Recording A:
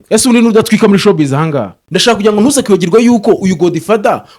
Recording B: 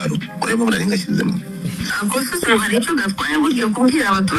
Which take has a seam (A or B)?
A